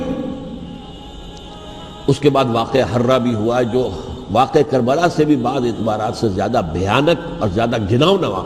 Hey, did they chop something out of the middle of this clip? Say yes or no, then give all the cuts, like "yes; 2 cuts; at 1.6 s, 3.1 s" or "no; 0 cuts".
yes; 1 cut; at 0.9 s